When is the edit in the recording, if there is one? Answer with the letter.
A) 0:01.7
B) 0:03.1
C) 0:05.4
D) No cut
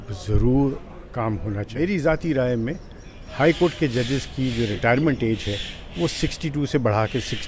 A